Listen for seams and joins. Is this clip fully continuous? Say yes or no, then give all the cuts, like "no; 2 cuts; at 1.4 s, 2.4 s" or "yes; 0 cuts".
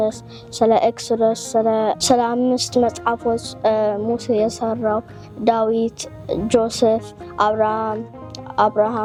yes; 0 cuts